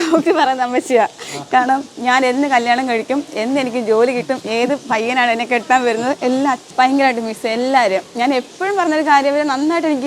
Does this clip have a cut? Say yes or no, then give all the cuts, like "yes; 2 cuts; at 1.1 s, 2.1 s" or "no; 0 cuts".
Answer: yes; 1 cut; at 6.6 s